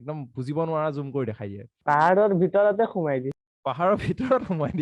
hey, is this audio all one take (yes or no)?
no